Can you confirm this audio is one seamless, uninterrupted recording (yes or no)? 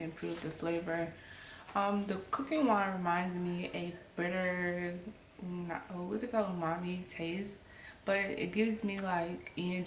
yes